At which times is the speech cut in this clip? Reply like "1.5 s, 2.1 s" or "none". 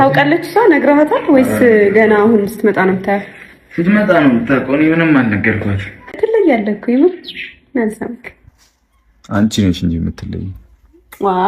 6.2 s